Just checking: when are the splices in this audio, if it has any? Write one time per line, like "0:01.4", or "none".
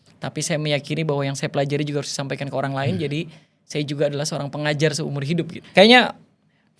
0:05.6